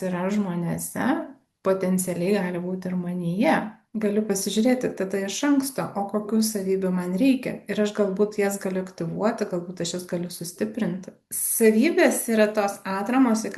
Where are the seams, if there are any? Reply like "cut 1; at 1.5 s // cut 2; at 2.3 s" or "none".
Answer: cut 1; at 3.8 s // cut 2; at 11.1 s